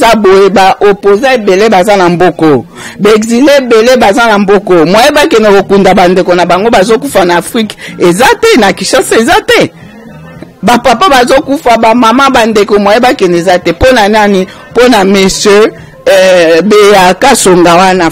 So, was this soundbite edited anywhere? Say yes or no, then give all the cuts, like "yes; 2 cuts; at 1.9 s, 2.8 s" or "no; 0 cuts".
no; 0 cuts